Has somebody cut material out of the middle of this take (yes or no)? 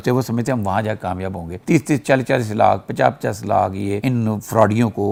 no